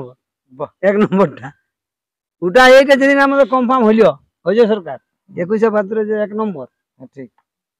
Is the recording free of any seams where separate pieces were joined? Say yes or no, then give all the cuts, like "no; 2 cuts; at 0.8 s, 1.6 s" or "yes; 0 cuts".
yes; 0 cuts